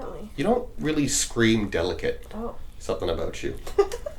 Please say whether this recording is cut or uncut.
uncut